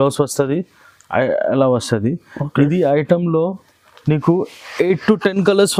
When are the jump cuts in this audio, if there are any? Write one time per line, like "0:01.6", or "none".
none